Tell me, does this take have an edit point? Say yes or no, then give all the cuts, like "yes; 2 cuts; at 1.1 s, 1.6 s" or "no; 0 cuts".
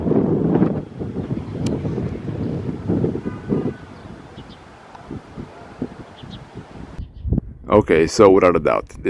no; 0 cuts